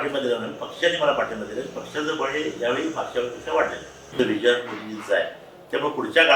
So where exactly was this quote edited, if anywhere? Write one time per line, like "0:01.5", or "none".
0:04.0